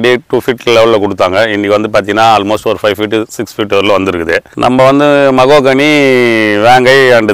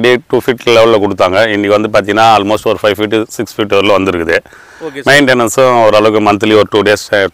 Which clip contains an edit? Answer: first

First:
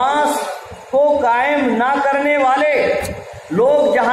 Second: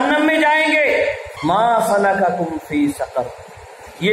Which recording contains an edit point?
second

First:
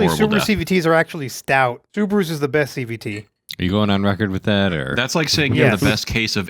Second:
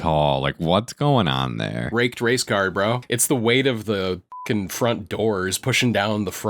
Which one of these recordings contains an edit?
second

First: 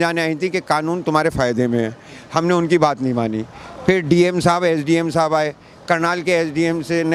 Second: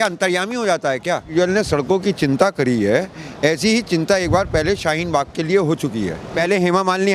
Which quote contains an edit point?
second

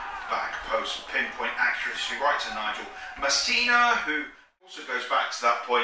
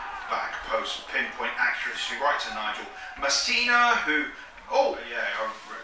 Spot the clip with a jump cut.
first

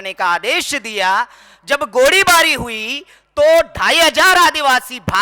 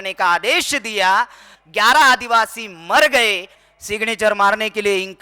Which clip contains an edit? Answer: second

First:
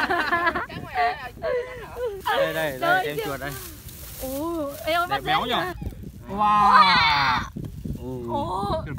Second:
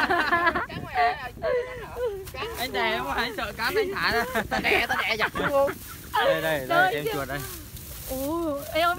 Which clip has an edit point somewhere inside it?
first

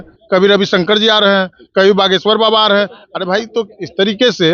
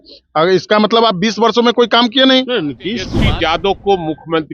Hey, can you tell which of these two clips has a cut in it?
second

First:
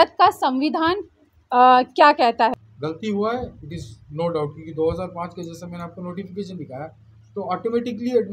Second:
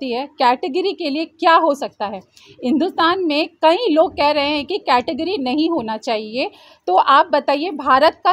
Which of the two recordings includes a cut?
first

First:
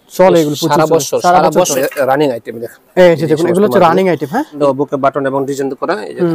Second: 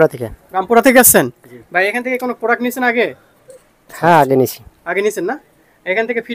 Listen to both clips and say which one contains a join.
first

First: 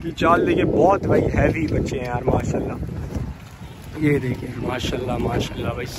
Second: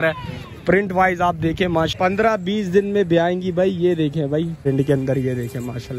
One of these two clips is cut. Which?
second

